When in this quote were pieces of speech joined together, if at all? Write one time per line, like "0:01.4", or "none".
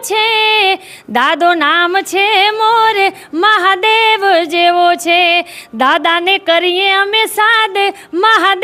none